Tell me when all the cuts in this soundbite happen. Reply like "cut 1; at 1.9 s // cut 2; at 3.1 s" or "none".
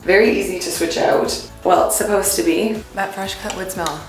cut 1; at 2.8 s